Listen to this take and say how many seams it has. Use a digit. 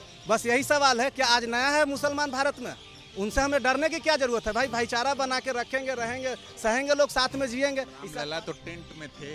1